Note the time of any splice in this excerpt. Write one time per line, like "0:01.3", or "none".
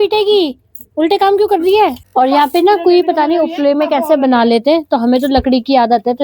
0:02.0

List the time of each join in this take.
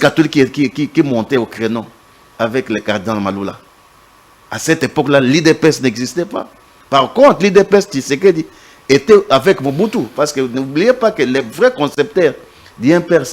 none

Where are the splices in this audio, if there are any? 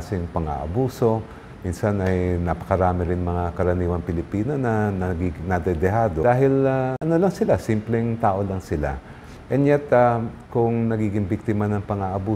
0:06.2
0:07.0

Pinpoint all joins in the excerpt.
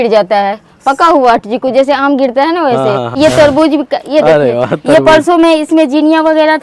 0:03.1

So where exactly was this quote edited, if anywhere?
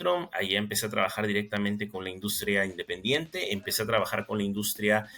none

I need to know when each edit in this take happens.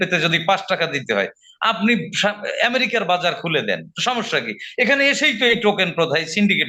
none

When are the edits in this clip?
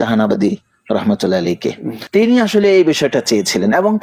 0:01.9

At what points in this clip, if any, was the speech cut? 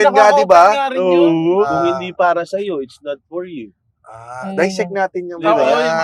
0:01.7

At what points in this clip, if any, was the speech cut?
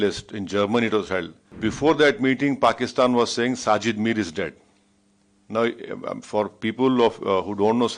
0:01.4

